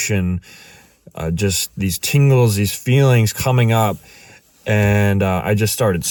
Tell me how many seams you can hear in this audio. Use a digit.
0